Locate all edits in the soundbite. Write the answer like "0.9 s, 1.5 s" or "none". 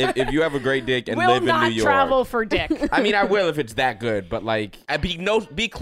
4.8 s